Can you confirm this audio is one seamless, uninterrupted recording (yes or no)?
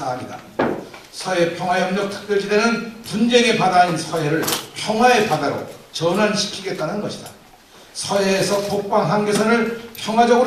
yes